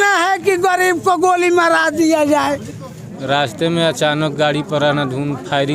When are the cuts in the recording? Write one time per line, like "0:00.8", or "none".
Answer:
0:03.1